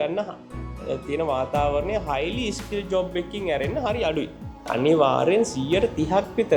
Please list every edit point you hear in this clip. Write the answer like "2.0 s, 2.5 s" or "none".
4.7 s